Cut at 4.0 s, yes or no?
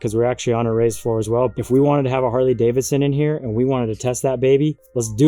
no